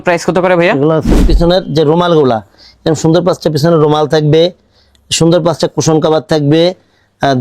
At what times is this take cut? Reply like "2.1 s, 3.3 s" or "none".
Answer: 1.3 s

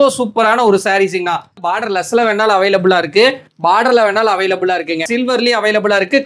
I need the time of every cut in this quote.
1.6 s, 5.1 s

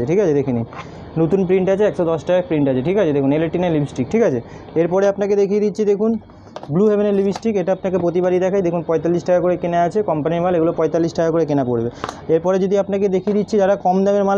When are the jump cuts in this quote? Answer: none

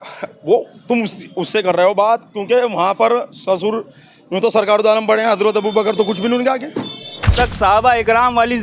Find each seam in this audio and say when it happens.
7.3 s

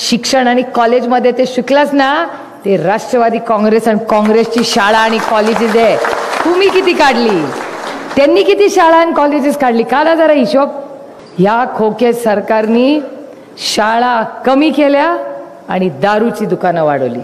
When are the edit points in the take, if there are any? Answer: none

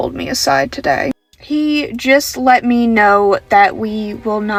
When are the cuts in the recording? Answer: none

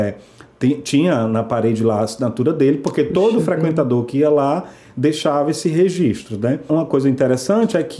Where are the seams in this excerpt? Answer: 6.7 s

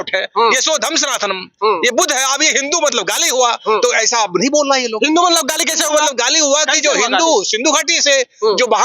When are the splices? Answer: none

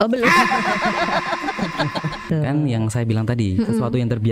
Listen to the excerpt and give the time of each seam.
2.3 s

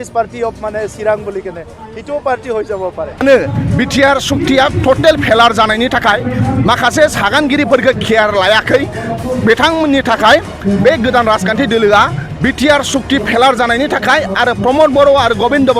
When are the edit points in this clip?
3.1 s

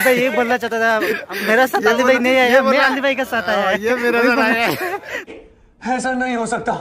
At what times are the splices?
none

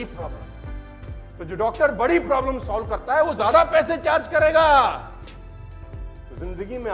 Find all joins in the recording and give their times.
none

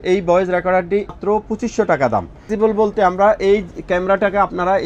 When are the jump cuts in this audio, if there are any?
1.2 s, 2.5 s

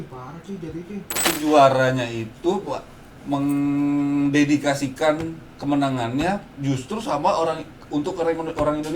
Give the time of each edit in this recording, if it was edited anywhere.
1.2 s

